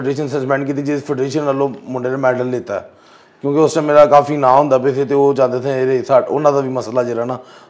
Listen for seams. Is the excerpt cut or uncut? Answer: uncut